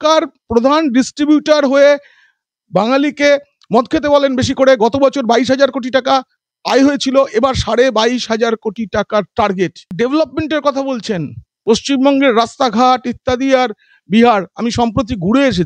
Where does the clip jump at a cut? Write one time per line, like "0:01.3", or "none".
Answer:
0:09.9